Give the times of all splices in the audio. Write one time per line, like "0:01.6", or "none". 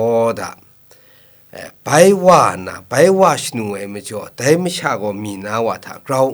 none